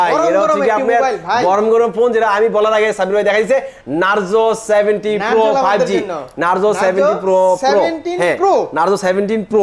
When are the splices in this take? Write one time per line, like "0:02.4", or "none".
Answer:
none